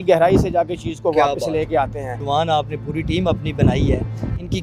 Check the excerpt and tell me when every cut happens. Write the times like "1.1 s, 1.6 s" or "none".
2.1 s